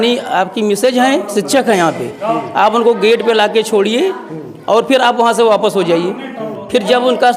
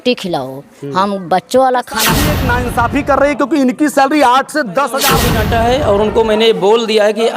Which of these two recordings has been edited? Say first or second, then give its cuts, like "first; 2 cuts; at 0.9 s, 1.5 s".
second; 2 cuts; at 2.3 s, 5.3 s